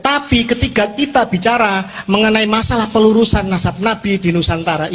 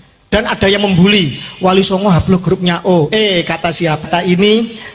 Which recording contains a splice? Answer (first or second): second